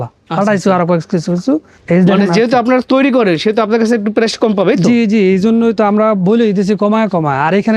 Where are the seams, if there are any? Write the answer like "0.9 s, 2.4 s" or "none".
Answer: 1.7 s